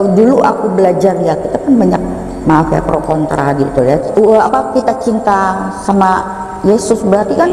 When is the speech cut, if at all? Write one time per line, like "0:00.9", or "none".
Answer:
0:04.1

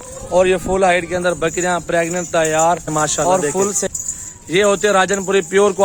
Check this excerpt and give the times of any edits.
0:03.9

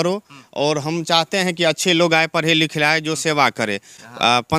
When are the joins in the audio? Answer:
none

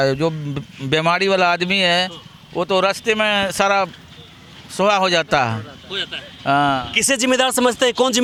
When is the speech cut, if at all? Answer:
none

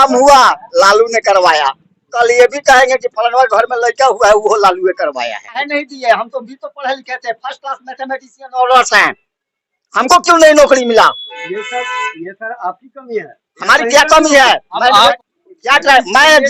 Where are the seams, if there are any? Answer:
0:05.6
0:15.2

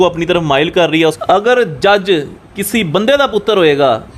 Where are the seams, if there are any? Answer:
0:01.0

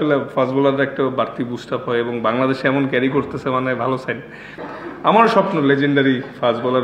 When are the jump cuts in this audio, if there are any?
0:04.2

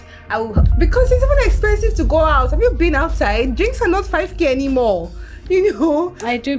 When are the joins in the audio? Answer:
none

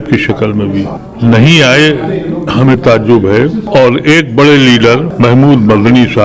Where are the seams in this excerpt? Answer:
0:01.0
0:03.6
0:05.1

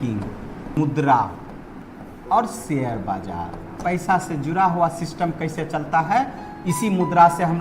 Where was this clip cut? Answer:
0:00.8
0:01.8
0:03.8

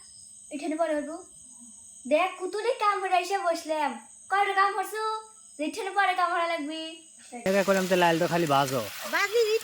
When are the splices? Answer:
0:07.5

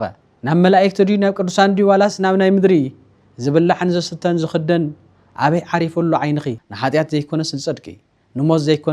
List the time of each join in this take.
0:06.6

